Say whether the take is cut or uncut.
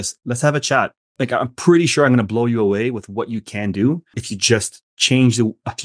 cut